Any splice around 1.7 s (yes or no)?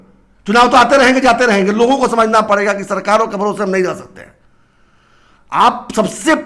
no